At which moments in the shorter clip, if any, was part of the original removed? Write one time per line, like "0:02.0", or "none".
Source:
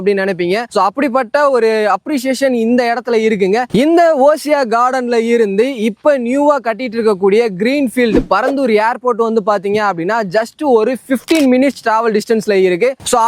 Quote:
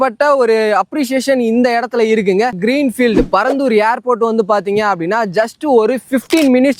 0:02.5